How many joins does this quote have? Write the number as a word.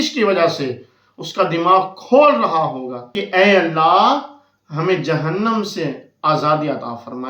one